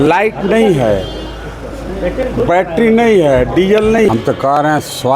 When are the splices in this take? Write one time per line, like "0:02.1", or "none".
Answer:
0:04.1

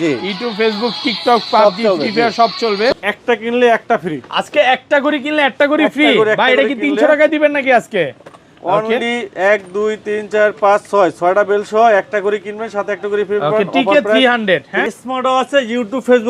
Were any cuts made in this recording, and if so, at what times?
0:02.9
0:14.8

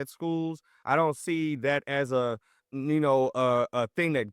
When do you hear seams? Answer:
0:02.7

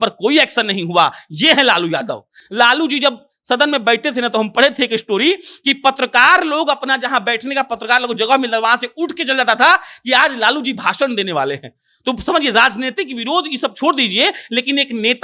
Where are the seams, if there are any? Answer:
0:02.4

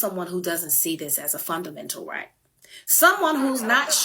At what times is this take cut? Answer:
0:02.3

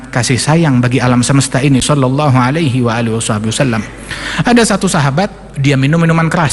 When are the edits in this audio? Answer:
none

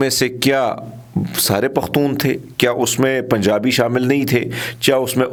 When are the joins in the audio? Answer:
none

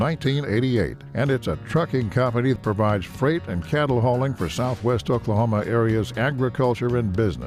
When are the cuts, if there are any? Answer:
0:02.6

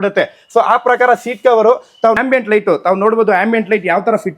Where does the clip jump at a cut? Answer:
0:02.2

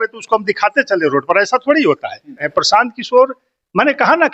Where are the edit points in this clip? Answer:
0:02.5

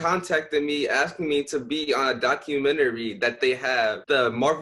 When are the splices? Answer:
none

